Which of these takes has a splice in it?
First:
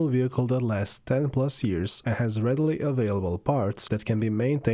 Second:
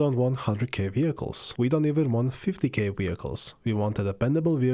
first; 1 cut; at 2.0 s

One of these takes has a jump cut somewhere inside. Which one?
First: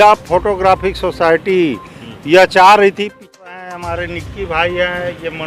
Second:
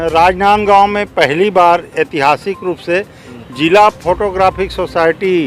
first; 1 cut; at 3.5 s

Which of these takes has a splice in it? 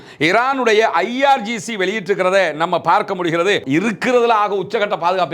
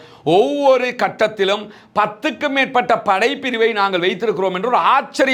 first; 1 cut; at 3.6 s

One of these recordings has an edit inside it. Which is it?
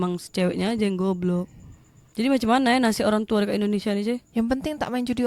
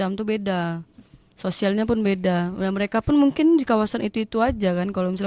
first; 1 cut; at 2.0 s

